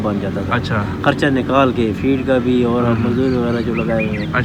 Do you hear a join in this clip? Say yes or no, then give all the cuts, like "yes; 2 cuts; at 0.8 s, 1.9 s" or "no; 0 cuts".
no; 0 cuts